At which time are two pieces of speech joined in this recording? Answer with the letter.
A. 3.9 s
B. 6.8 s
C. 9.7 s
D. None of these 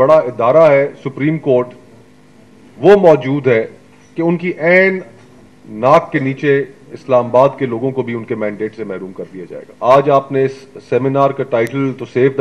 C